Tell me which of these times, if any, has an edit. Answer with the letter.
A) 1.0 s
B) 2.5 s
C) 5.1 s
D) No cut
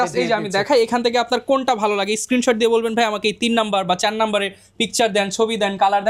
D